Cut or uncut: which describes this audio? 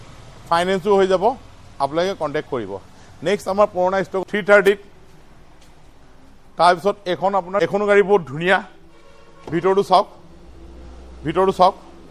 uncut